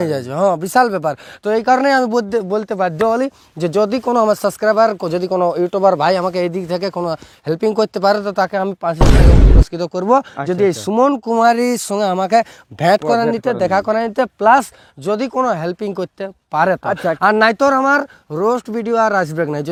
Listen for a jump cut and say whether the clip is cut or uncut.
uncut